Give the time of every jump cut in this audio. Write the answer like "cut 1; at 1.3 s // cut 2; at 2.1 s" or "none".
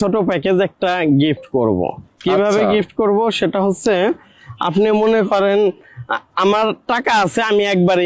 none